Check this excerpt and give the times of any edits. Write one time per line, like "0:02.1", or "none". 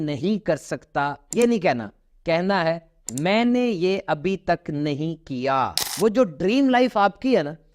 0:05.8